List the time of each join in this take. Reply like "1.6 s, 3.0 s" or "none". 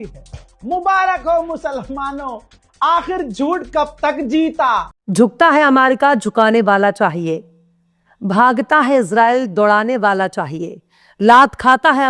4.9 s